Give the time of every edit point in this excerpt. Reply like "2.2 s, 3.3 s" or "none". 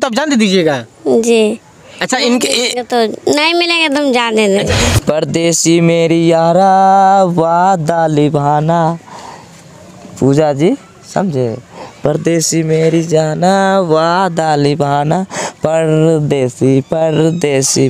4.8 s